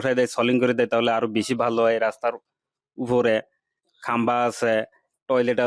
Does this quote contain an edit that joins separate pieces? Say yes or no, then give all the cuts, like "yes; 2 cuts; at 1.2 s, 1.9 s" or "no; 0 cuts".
no; 0 cuts